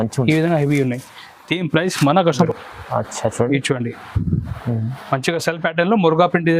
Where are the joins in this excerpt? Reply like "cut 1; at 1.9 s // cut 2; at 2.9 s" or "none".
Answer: cut 1; at 2.5 s